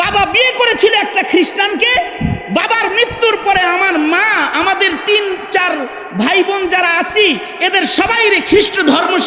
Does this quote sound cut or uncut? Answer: uncut